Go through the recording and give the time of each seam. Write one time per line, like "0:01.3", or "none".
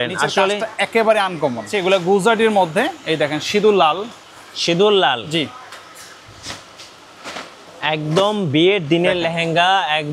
0:01.7